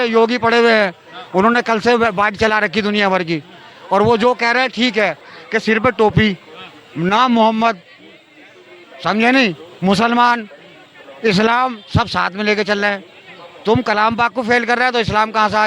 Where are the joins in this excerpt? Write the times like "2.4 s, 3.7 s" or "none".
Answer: 5.3 s